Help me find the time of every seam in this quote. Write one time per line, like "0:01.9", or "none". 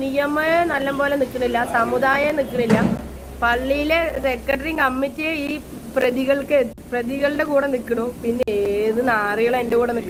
none